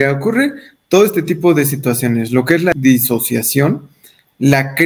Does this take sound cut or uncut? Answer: cut